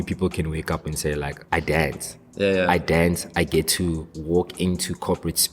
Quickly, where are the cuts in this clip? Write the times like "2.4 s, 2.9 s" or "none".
1.4 s, 4.1 s